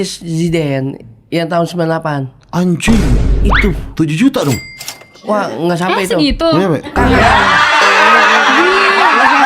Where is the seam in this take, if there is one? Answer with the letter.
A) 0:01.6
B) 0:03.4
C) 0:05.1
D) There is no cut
D